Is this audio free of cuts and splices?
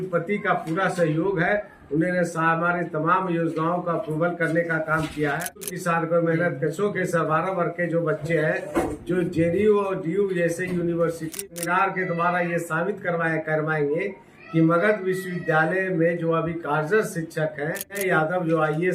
no; 3 cuts; at 5.7 s, 11.4 s, 18.0 s

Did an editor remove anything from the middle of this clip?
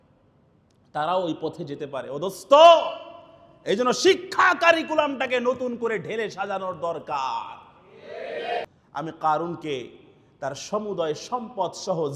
yes; 1 cut; at 8.7 s

